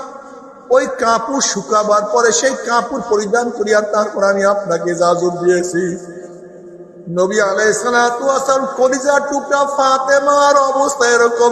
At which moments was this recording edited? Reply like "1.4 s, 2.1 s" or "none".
none